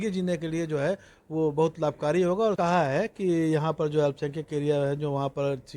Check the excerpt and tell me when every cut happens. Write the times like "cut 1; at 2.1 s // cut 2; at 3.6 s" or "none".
cut 1; at 2.6 s